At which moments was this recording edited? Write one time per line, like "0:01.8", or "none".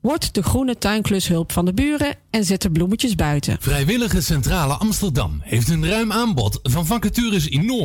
0:03.6